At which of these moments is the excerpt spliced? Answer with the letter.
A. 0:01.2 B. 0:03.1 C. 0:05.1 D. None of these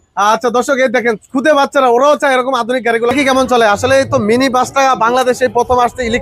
B